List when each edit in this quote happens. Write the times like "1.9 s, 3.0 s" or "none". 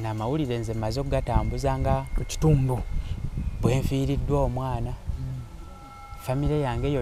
none